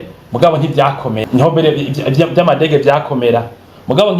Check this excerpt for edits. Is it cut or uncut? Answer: cut